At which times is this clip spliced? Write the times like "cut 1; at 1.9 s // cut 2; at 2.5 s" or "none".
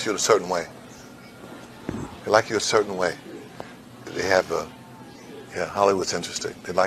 none